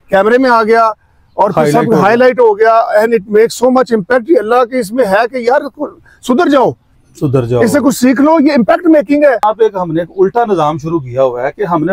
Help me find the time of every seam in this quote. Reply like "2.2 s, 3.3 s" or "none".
9.4 s